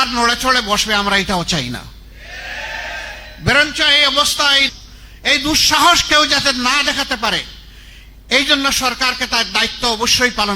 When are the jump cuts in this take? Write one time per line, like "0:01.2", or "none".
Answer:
0:04.7